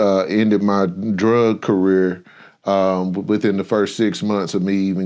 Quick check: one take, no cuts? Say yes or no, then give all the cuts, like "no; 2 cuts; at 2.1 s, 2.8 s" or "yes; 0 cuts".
yes; 0 cuts